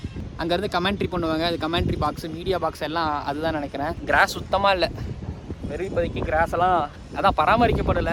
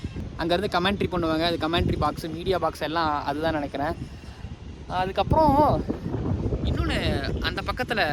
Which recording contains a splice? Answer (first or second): first